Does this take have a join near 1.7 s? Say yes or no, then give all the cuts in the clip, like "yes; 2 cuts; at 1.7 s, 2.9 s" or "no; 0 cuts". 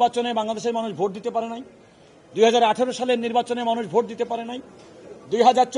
no; 0 cuts